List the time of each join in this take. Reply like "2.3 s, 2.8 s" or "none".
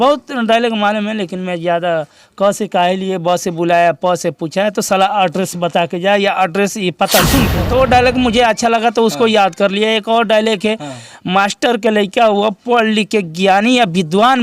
7.6 s